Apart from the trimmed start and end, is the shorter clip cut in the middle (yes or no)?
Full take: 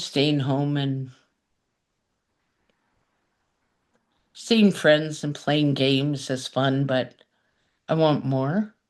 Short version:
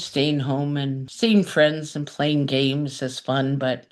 yes